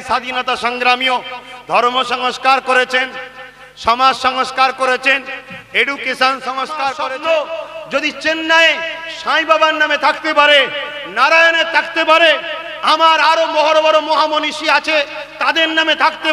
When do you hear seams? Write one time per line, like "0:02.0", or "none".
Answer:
0:07.1

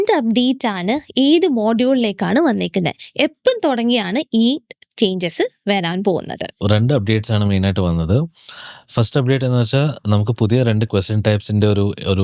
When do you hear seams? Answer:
0:06.6

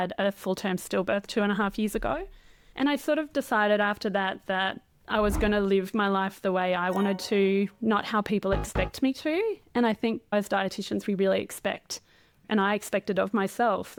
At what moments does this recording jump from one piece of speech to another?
none

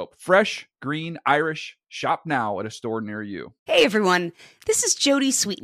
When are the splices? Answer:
0:03.5

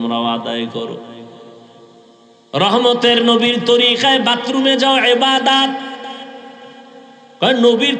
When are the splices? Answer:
0:02.4

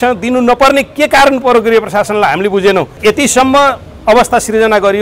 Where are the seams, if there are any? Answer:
0:03.0

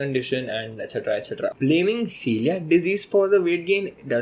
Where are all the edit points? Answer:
0:01.5

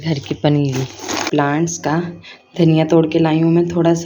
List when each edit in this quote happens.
0:01.3

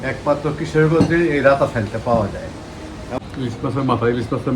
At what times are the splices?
0:03.2

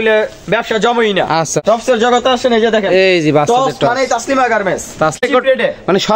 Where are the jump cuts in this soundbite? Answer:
0:01.6
0:05.2

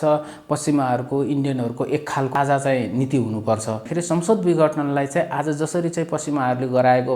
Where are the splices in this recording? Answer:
0:02.3
0:03.9

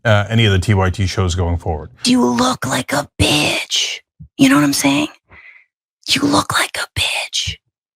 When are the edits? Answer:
0:02.0

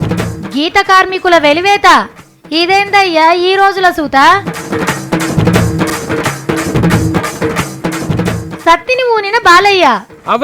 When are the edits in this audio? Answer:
0:05.9

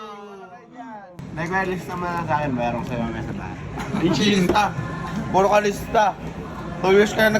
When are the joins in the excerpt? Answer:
0:01.1

